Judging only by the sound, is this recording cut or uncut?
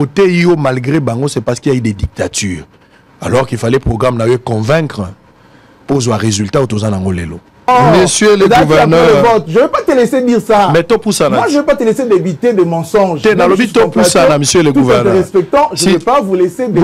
cut